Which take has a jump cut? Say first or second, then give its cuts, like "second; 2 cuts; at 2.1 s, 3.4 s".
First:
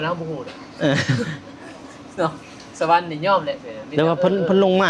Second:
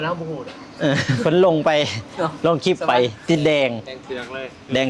second; 1 cut; at 1.2 s